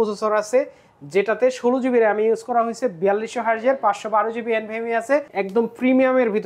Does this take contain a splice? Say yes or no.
yes